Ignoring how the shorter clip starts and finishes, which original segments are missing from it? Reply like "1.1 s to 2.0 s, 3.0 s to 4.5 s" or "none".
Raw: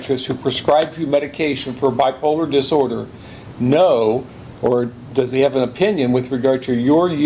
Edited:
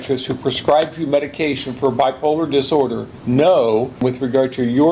3.1 s to 3.4 s, 4.3 s to 6.1 s